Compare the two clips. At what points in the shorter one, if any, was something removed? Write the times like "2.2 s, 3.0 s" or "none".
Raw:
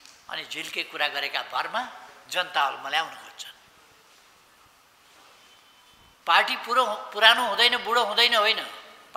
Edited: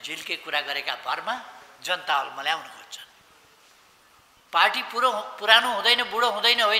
4.4 s

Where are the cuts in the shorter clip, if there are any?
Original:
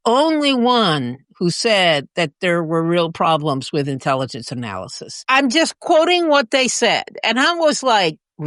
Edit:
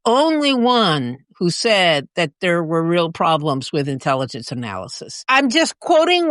none

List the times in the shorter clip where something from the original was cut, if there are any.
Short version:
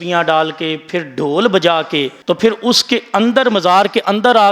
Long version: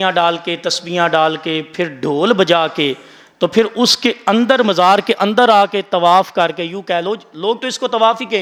2.1 s

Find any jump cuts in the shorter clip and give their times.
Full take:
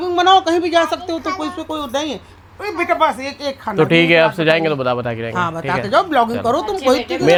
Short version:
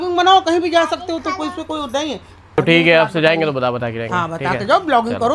2.6 s

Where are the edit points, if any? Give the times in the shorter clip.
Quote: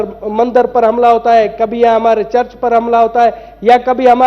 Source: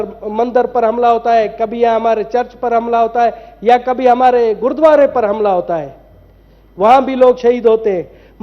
none

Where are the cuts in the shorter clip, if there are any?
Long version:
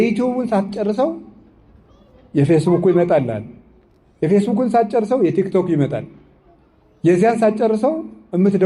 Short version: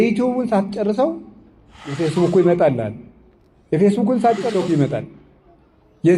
2.0 s, 4.5 s

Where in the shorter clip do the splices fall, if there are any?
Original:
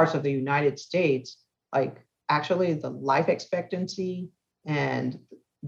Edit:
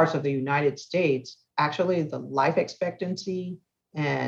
1.4 s

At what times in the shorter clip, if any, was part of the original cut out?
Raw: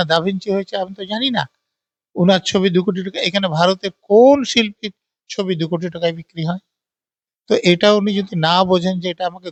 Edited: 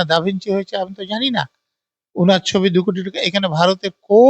none

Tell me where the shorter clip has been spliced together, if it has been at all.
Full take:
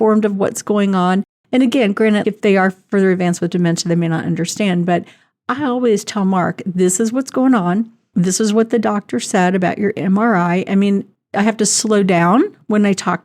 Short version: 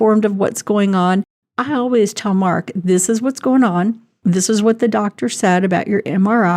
1.4 s

